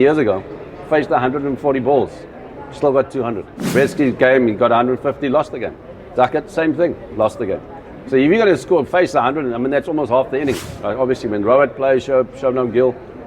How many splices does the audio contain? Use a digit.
2